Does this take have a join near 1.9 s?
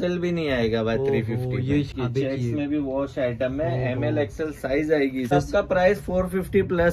yes; 2 cuts; at 1.9 s, 5.3 s

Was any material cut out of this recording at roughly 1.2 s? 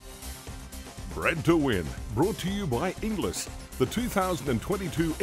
yes; 1 cut; at 1.2 s

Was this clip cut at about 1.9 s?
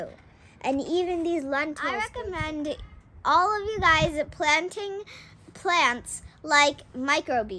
yes; 1 cut; at 1.9 s

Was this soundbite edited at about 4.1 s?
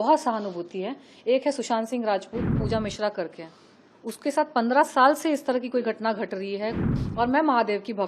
no; 2 cuts; at 2.6 s, 6.9 s

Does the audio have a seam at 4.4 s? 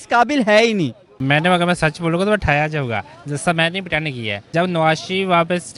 yes; 2 cuts; at 1.2 s, 4.4 s

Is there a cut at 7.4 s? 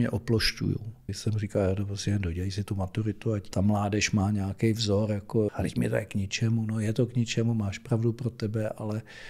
no; 3 cuts; at 1.1 s, 3.5 s, 5.5 s

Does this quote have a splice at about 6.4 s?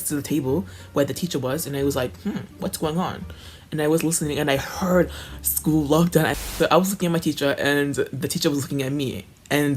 yes; 1 cut; at 6.4 s

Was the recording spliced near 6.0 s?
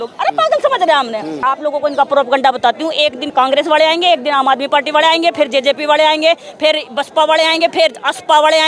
no; 2 cuts; at 1.3 s, 3.3 s

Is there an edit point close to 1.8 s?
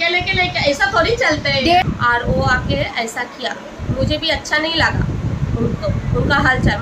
yes; 1 cut; at 1.8 s

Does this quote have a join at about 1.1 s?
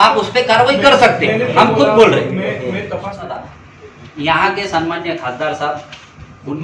no; 1 cut; at 3.3 s

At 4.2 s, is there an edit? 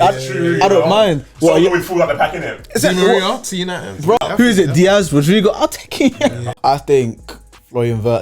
yes; 2 cuts; at 4.2 s, 6.5 s

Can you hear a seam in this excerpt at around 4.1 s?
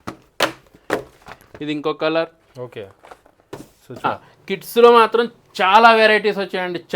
yes; 1 cut; at 4.1 s

